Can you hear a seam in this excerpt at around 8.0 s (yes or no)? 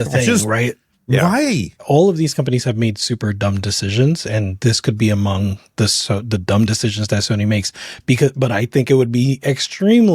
no